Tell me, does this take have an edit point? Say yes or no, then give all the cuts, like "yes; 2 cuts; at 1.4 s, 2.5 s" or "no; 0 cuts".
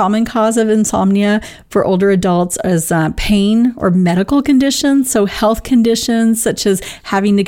no; 0 cuts